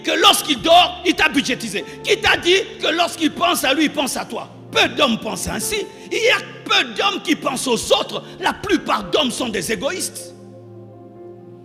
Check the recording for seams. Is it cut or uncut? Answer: uncut